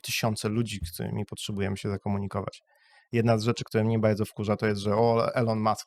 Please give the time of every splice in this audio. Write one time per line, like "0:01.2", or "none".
none